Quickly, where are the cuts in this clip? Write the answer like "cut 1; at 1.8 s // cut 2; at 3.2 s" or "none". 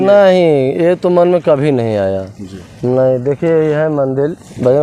none